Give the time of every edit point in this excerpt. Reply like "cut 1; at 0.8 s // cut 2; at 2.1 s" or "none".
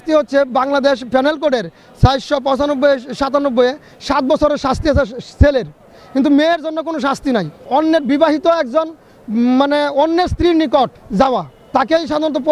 cut 1; at 7.6 s // cut 2; at 11.2 s